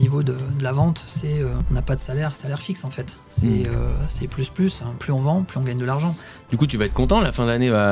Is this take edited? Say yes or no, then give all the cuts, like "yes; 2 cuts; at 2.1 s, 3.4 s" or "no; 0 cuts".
yes; 2 cuts; at 1.6 s, 6.3 s